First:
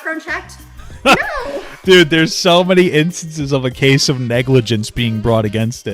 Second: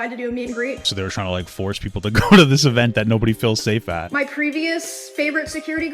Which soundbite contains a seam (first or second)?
second